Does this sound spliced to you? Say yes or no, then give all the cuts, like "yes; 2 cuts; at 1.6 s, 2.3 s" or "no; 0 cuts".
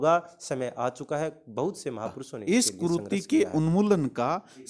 yes; 1 cut; at 2.3 s